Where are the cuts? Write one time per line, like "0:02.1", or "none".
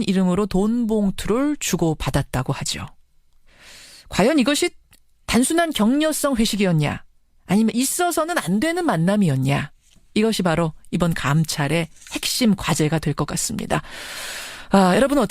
0:07.4